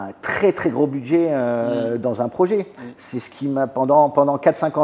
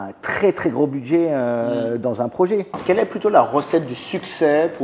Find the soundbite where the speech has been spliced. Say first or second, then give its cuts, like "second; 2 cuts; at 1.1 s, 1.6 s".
second; 1 cut; at 2.7 s